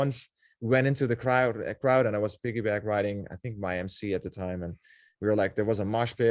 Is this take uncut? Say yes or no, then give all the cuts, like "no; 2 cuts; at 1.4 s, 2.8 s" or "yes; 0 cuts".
yes; 0 cuts